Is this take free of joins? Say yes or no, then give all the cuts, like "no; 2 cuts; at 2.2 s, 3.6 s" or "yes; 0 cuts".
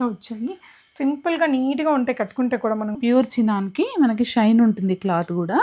no; 1 cut; at 3.0 s